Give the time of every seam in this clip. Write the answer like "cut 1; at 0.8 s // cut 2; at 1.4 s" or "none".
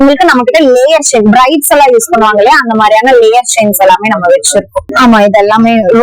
cut 1; at 4.9 s